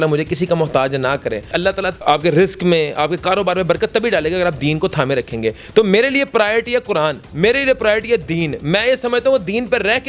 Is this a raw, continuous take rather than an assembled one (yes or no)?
no